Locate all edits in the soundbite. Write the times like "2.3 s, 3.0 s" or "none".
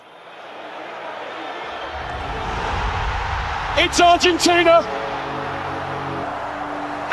6.2 s